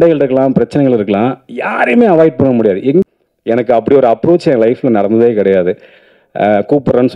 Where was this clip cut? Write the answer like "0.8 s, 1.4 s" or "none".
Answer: 3.1 s